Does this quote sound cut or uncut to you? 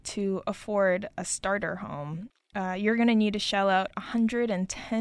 uncut